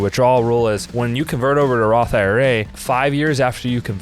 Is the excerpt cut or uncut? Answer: cut